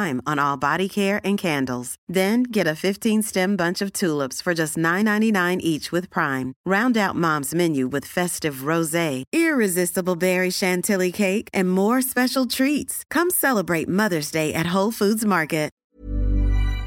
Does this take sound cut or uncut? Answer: cut